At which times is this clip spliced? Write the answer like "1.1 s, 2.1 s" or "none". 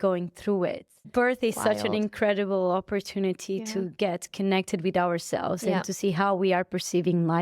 1.1 s

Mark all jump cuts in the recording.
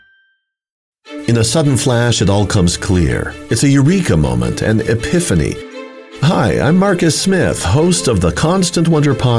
0.9 s

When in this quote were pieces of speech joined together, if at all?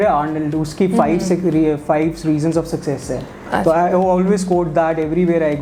none

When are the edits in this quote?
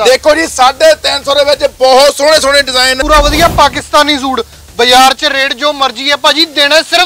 3.0 s

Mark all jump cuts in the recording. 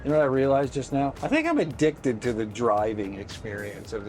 1.1 s

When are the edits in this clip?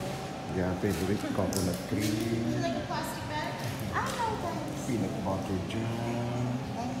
none

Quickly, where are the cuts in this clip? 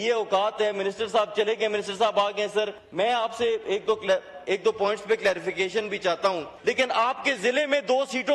2.8 s, 6.5 s

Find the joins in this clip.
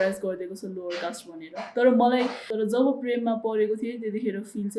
2.5 s

